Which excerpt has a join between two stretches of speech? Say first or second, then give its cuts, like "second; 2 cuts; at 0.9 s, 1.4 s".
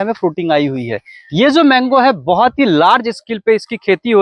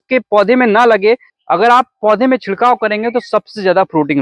second; 1 cut; at 1.3 s